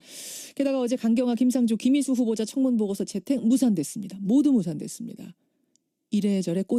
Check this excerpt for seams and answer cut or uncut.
uncut